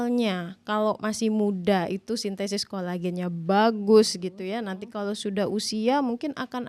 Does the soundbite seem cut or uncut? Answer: uncut